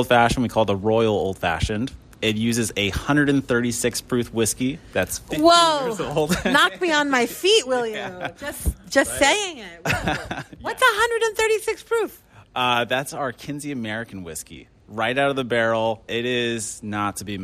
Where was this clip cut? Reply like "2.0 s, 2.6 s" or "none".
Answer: 16.1 s